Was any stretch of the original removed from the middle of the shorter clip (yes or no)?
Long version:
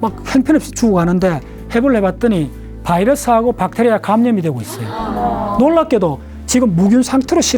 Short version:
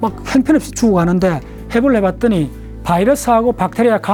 no